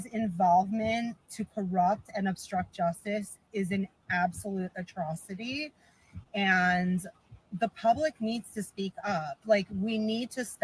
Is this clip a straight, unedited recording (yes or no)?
yes